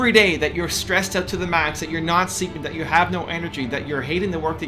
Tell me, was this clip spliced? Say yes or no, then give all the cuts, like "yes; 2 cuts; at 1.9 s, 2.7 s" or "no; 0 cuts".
no; 0 cuts